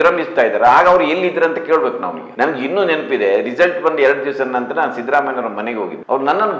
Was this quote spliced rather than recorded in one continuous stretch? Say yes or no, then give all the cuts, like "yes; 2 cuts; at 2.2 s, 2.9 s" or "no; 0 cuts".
yes; 1 cut; at 2.2 s